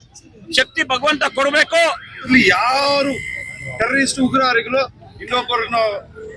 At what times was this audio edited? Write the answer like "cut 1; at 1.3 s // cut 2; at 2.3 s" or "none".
cut 1; at 2.3 s